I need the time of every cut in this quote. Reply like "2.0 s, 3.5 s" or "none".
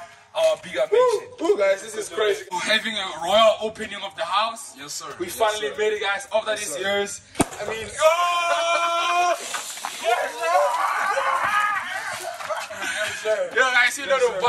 2.4 s, 12.7 s